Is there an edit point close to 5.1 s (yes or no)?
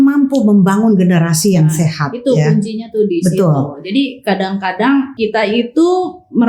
yes